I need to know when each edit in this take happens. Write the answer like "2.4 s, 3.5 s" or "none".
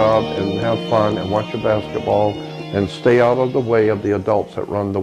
none